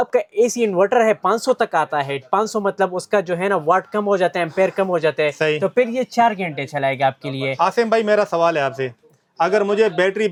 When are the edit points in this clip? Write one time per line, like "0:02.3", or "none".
none